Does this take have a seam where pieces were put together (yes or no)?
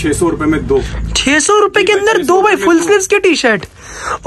no